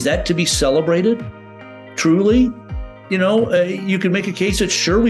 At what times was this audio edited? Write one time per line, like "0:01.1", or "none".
none